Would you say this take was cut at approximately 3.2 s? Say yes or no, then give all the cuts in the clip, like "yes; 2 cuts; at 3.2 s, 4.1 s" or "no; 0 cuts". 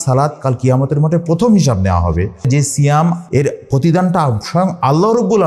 yes; 2 cuts; at 2.5 s, 3.2 s